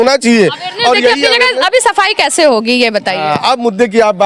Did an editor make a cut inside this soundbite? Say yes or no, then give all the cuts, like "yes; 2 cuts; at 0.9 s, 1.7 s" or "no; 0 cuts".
no; 0 cuts